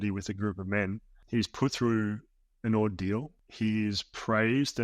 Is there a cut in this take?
yes; 2 cuts; at 1.1 s, 3.4 s

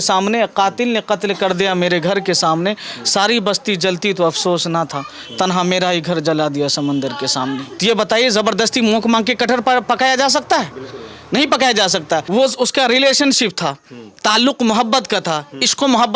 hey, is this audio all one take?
no; 2 cuts; at 7.7 s, 12.2 s

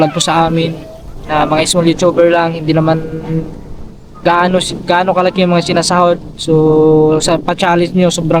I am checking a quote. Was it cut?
no; 0 cuts

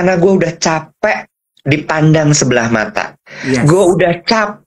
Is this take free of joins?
yes; 0 cuts

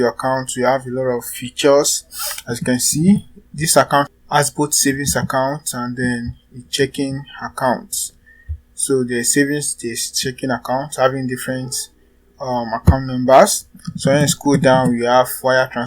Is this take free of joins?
no; 1 cut; at 4.1 s

